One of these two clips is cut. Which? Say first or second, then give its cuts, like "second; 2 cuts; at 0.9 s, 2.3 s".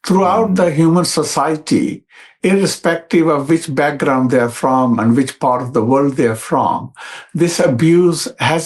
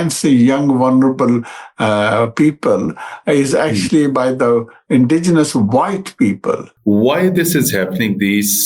second; 1 cut; at 6.7 s